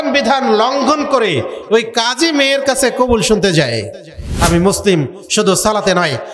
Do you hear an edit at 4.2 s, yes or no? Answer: yes